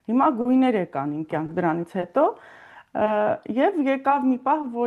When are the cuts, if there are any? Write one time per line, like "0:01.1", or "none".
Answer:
none